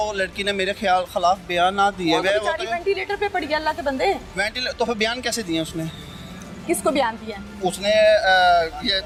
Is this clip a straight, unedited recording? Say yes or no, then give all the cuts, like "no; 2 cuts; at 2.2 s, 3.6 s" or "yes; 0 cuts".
yes; 0 cuts